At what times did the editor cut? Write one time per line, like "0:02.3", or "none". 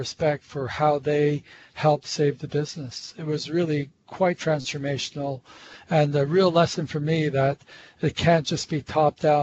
none